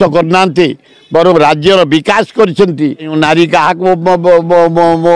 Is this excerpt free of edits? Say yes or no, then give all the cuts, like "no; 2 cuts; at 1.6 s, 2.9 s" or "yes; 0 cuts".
no; 1 cut; at 3.1 s